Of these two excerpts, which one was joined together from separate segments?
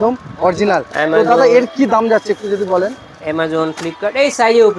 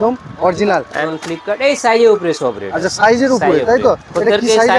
second; 1 cut; at 1.1 s

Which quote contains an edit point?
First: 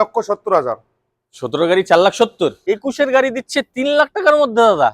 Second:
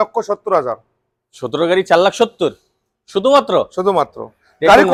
first; 1 cut; at 2.6 s

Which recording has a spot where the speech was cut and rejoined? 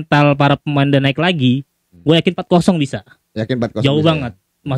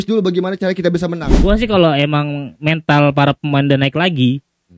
second; 1 cut; at 1.4 s

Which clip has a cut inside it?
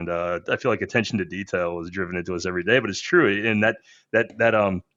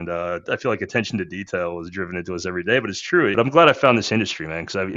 second; 1 cut; at 3.3 s

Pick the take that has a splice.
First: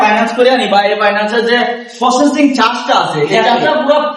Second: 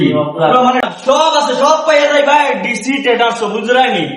second; 1 cut; at 0.9 s

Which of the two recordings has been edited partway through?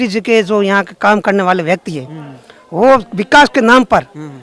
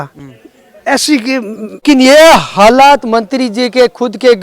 second; 1 cut; at 1.8 s

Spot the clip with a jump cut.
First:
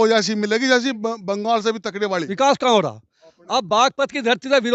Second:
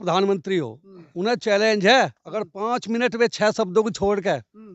first; 1 cut; at 2.1 s

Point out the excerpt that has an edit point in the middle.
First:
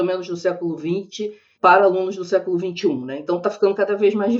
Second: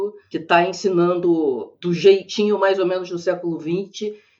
second; 1 cut; at 1.7 s

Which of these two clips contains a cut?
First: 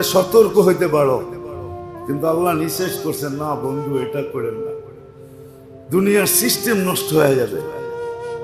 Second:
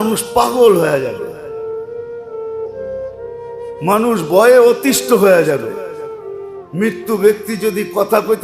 second; 2 cuts; at 1.3 s, 3.1 s

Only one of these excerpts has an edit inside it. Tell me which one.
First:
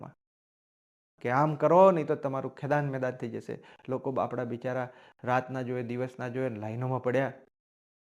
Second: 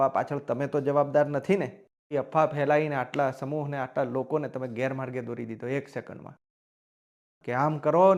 second; 1 cut; at 2.0 s

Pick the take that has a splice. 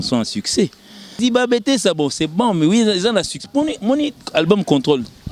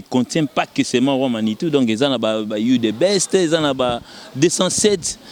first; 1 cut; at 1.2 s

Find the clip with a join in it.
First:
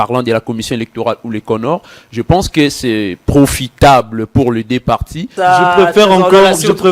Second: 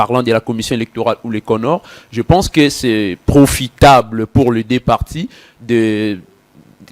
first; 1 cut; at 5.3 s

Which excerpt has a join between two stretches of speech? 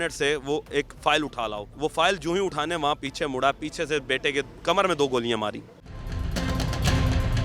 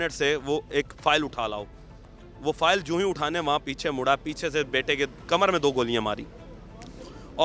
first; 2 cuts; at 1.6 s, 6.1 s

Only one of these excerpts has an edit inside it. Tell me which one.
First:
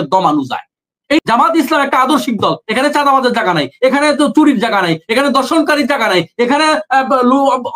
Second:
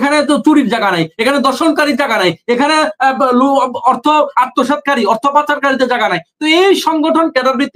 first; 1 cut; at 1.2 s

